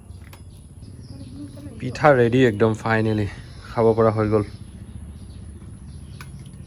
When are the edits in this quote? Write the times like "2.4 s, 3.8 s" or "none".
none